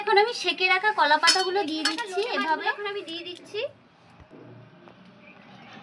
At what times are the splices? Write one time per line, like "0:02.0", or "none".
0:02.7